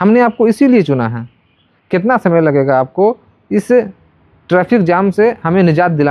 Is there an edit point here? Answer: no; 0 cuts

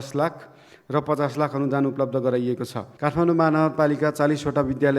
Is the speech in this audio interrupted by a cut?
yes; 1 cut; at 2.8 s

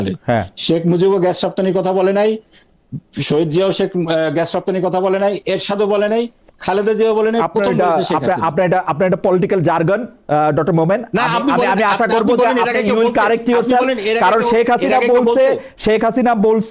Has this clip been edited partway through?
no; 0 cuts

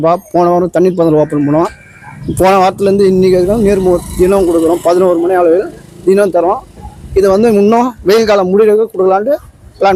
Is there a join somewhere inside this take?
no; 0 cuts

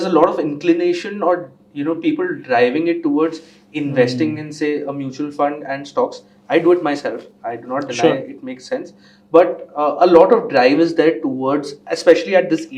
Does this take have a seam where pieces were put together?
no; 0 cuts

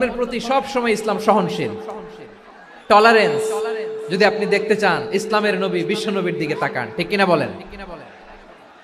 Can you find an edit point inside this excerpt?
no; 0 cuts

